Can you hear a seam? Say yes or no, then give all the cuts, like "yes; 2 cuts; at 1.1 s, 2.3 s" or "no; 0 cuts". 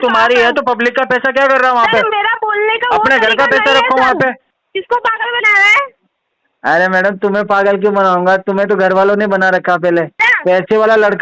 yes; 2 cuts; at 4.5 s, 10.2 s